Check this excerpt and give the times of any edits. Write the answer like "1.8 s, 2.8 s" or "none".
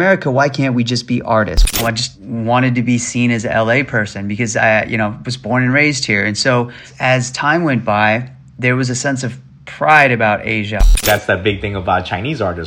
1.7 s, 6.8 s, 11.0 s